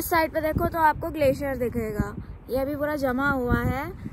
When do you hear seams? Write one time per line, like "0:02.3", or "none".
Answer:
none

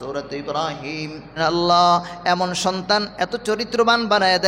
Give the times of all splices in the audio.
0:01.4

